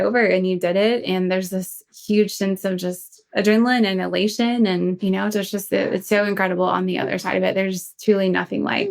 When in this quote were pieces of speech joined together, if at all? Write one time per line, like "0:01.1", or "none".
0:05.0